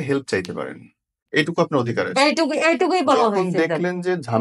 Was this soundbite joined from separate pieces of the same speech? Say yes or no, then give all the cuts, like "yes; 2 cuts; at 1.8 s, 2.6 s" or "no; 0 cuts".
yes; 1 cut; at 1.2 s